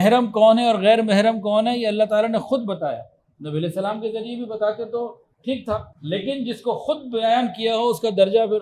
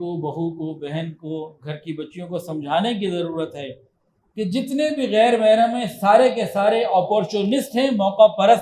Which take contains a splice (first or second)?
first